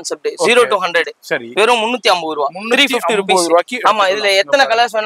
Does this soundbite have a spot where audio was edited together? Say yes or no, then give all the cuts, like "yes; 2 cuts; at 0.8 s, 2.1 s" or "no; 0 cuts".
no; 0 cuts